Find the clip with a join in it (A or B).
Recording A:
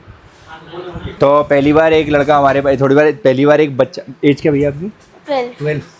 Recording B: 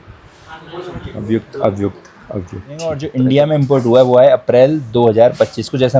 B